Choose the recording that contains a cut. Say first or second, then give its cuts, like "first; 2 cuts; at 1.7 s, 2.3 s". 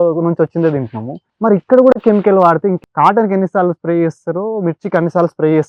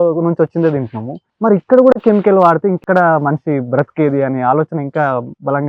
first; 1 cut; at 2.8 s